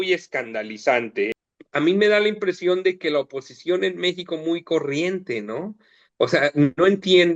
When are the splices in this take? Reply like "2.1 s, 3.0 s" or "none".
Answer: 1.3 s